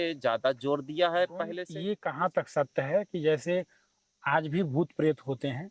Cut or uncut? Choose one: cut